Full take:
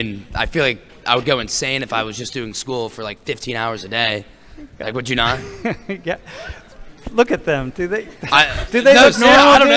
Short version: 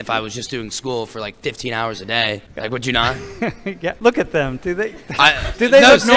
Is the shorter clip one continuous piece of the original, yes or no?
no